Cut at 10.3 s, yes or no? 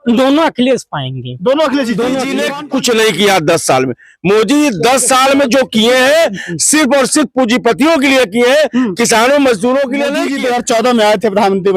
yes